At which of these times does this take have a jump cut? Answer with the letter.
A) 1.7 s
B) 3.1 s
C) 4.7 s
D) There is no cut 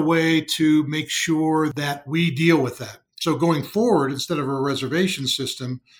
A